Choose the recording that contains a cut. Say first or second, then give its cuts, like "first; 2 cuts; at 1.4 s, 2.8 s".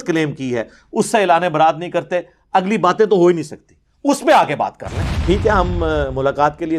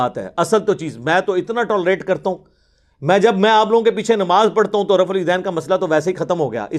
first; 1 cut; at 5.1 s